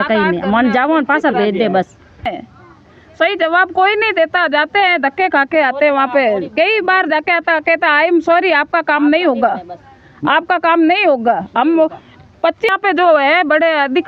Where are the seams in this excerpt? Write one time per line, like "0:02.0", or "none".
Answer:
0:02.2
0:12.7